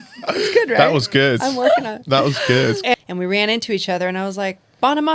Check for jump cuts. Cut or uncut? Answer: cut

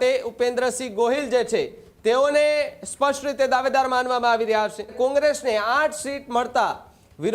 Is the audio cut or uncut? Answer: cut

